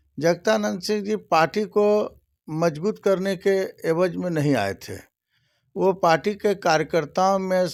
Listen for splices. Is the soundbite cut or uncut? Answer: uncut